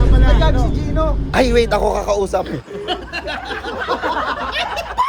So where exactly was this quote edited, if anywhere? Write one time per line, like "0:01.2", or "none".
none